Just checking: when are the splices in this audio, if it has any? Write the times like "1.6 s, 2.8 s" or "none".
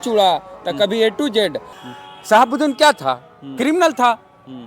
1.7 s